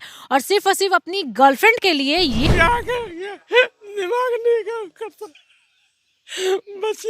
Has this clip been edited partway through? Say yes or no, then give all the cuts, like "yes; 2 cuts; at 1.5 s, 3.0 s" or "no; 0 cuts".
yes; 1 cut; at 2.4 s